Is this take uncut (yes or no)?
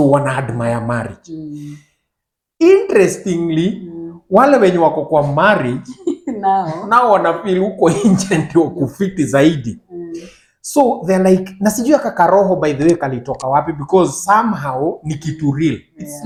yes